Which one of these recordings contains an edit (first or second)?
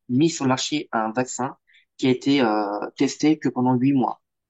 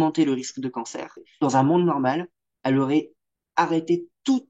second